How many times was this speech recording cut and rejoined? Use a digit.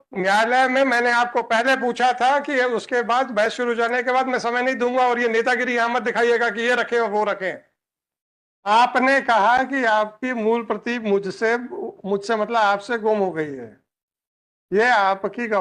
1